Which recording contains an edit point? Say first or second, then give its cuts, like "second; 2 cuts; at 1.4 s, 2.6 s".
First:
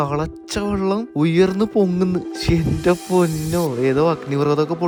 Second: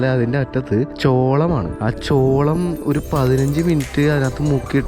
second; 2 cuts; at 0.9 s, 1.7 s